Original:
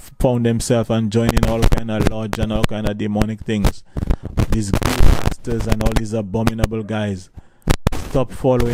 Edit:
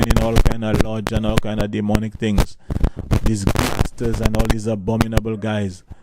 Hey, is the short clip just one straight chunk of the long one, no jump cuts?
no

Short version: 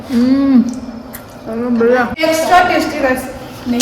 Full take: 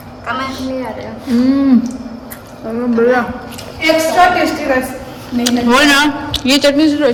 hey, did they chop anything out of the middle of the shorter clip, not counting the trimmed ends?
yes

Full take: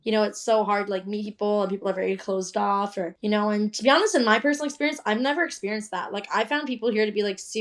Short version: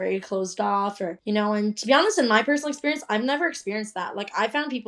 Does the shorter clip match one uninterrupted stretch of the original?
yes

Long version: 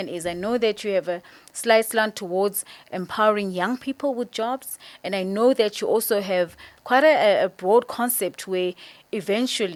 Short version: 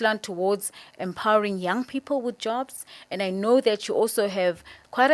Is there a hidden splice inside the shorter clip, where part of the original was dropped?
no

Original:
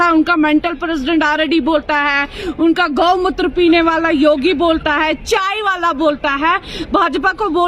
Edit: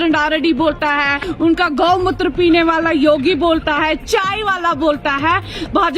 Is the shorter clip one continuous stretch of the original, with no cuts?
no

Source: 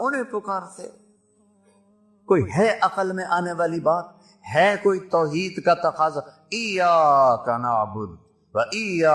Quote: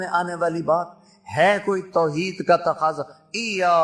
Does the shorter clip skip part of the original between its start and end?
no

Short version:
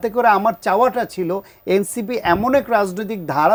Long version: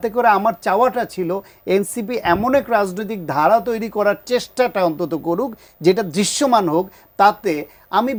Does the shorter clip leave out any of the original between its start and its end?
no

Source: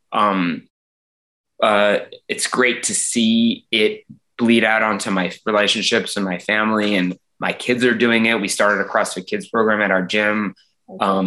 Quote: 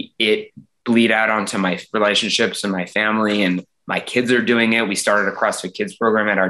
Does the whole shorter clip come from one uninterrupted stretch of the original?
yes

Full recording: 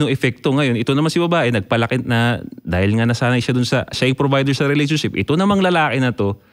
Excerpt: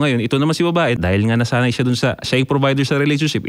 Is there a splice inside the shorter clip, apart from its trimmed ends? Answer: yes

